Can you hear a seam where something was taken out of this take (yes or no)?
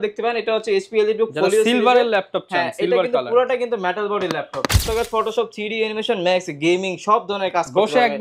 yes